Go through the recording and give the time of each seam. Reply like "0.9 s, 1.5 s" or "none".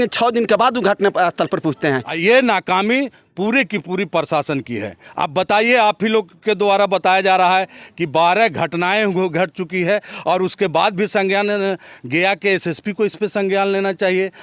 2.1 s

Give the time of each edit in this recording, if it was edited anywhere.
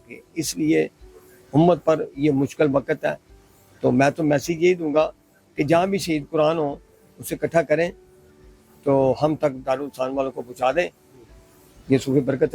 none

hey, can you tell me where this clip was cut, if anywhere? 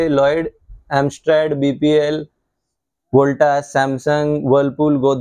none

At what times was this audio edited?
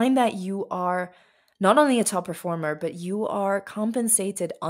none

